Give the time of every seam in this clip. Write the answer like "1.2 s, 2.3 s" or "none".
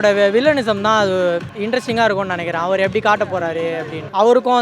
none

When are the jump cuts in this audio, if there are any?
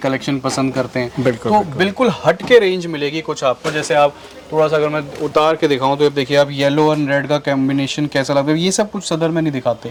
none

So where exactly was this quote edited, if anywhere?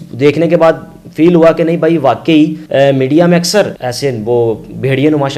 2.6 s, 3.8 s

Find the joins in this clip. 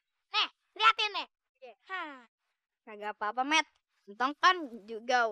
none

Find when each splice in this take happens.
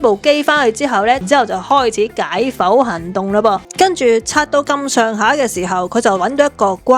1.2 s, 3.7 s

